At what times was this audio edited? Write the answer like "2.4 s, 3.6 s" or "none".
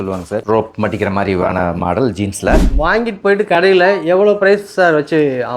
2.6 s